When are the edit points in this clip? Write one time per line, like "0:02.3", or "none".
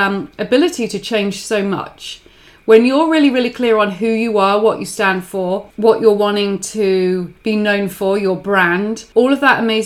0:05.7
0:07.3
0:09.0

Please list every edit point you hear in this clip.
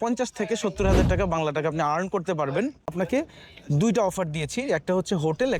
0:02.9

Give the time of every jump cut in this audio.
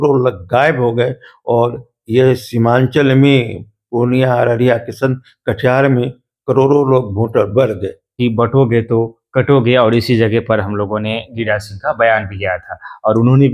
0:08.1

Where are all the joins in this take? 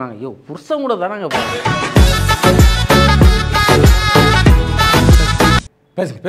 0:01.3
0:05.5

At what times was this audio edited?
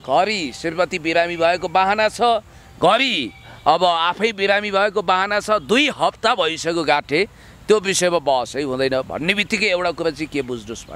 none

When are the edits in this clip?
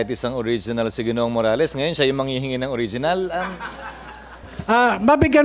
0:04.4

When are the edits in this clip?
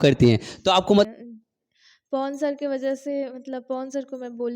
0:01.1

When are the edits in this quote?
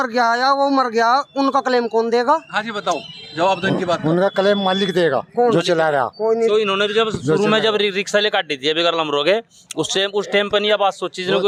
none

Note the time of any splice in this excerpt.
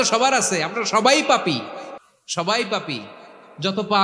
none

